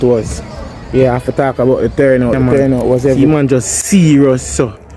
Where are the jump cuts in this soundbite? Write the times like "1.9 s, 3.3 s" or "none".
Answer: 3.2 s